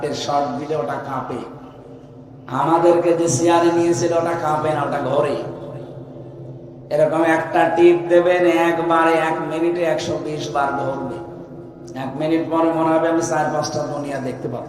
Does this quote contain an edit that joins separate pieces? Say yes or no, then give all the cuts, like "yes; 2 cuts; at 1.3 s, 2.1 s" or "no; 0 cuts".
no; 0 cuts